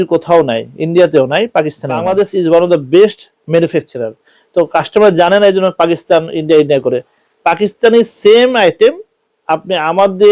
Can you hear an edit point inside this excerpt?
yes; 1 cut; at 2.0 s

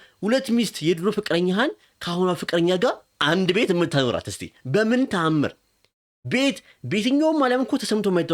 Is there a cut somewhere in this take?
no; 0 cuts

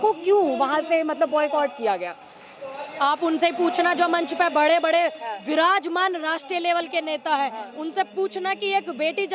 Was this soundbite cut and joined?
no; 0 cuts

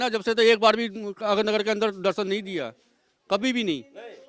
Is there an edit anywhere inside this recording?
no; 0 cuts

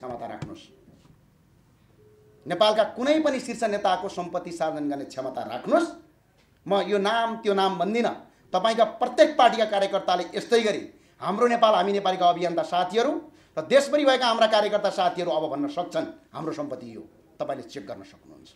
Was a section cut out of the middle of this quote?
no; 0 cuts

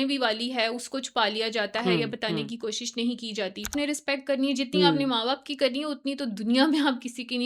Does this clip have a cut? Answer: yes; 1 cut; at 3.7 s

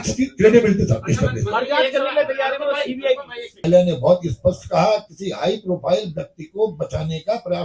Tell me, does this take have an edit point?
yes; 1 cut; at 3.6 s

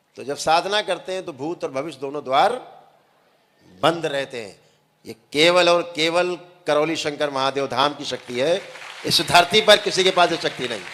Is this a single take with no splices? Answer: yes; 0 cuts

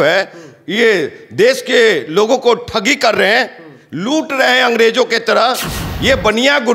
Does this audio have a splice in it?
no; 0 cuts

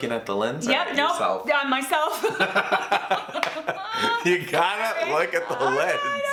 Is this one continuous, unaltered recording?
yes; 0 cuts

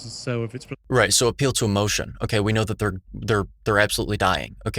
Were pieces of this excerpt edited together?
no; 0 cuts

